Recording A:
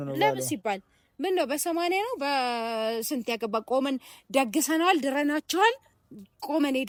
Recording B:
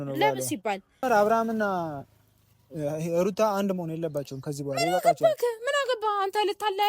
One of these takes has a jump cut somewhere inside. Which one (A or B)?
B